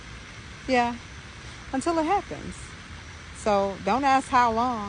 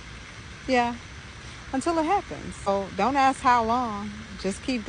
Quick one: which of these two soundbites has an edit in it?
second; 1 cut; at 2.7 s

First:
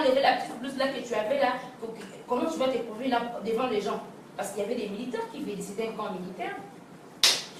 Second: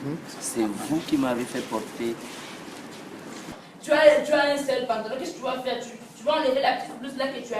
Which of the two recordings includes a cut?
second; 1 cut; at 3.5 s

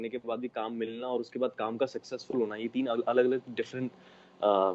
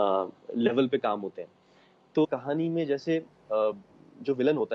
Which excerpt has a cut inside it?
second; 1 cut; at 2.2 s

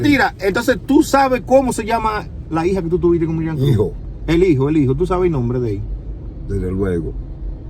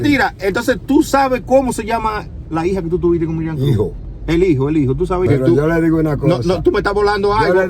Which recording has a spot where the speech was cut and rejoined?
second; 1 cut; at 5.3 s

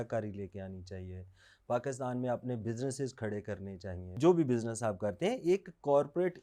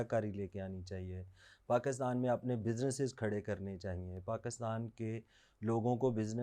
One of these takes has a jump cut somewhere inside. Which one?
first; 1 cut; at 4.1 s

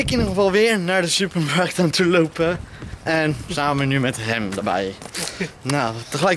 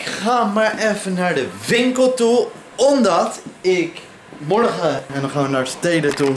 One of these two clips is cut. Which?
second; 1 cut; at 5.1 s

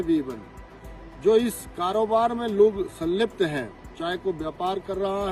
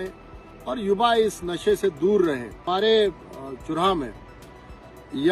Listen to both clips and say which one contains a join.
second; 1 cut; at 2.5 s

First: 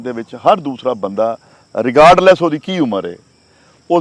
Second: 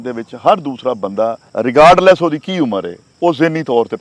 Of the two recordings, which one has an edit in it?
second; 2 cuts; at 1.4 s, 3.0 s

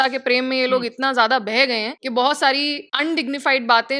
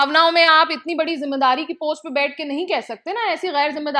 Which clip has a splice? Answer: first; 2 cuts; at 1.9 s, 2.8 s

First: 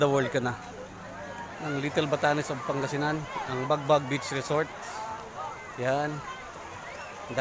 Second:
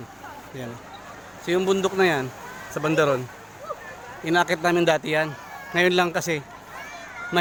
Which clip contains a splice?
first; 1 cut; at 1.4 s

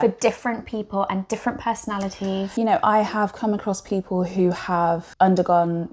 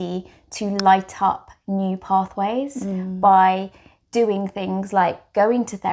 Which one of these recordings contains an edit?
first; 2 cuts; at 2.5 s, 5.1 s

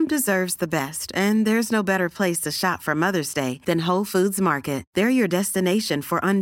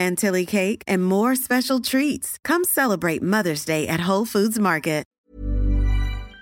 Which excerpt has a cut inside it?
second; 1 cut; at 5.2 s

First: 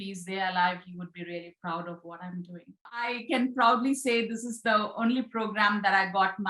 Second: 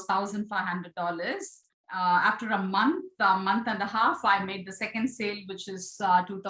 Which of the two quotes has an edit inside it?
first; 1 cut; at 3.2 s

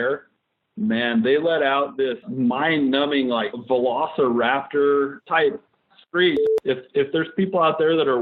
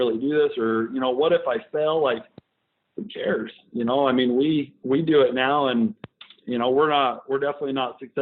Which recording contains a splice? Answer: first; 4 cuts; at 2.3 s, 3.6 s, 5.2 s, 6.5 s

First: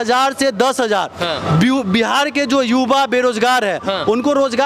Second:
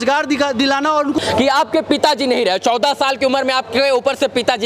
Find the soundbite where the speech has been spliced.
second; 1 cut; at 1.2 s

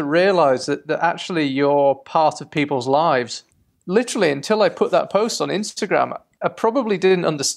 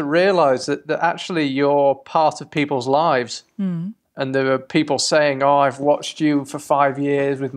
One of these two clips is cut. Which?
first; 1 cut; at 3.4 s

